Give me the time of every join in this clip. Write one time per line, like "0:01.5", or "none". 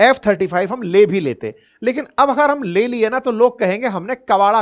none